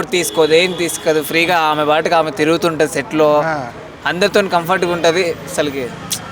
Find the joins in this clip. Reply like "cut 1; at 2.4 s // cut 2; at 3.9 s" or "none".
none